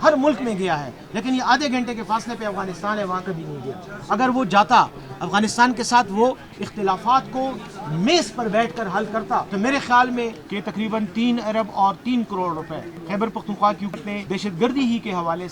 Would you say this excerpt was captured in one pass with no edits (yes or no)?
no